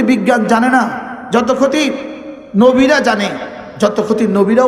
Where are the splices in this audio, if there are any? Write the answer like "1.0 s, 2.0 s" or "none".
none